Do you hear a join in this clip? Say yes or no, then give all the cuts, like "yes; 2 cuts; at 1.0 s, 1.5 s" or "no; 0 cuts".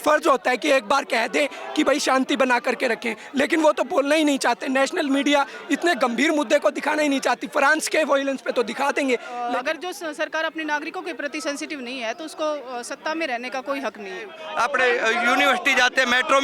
yes; 2 cuts; at 9.3 s, 14.4 s